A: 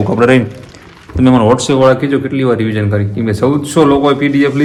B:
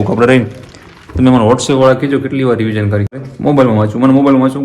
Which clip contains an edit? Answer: B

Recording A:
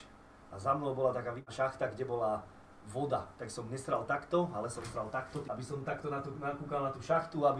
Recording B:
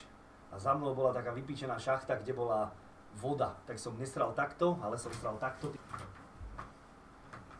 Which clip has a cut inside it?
A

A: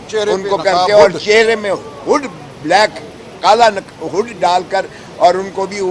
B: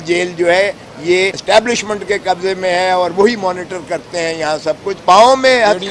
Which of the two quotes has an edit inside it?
B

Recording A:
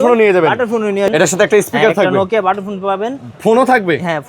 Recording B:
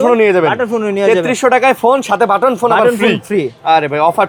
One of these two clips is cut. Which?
A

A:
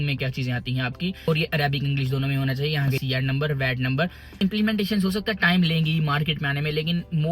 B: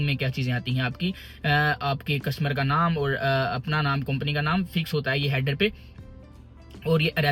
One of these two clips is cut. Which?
A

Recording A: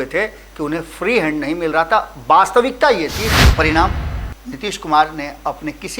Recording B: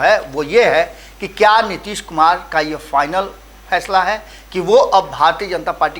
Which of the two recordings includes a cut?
A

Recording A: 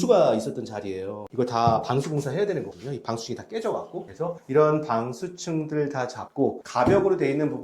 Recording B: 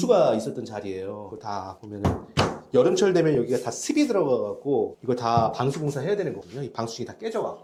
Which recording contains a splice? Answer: A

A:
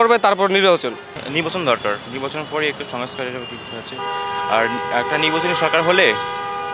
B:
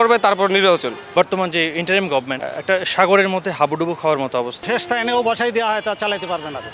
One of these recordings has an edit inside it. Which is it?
B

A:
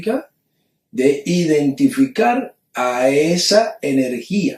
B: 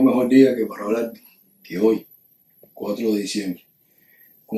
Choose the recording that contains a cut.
A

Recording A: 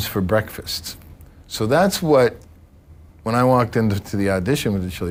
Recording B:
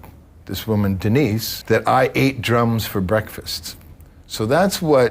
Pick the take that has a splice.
B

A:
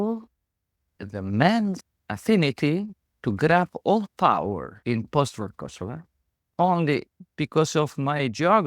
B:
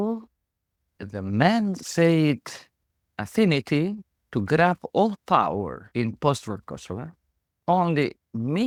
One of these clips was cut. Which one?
A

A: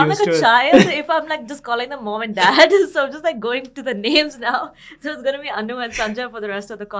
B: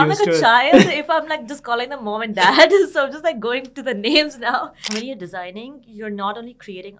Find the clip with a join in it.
B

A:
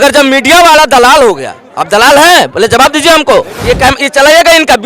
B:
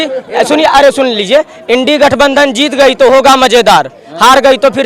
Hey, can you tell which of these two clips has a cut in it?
A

